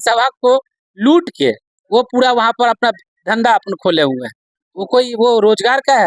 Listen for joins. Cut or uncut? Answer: uncut